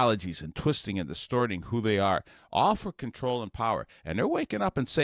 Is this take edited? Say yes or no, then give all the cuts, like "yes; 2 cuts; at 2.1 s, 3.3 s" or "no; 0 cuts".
no; 0 cuts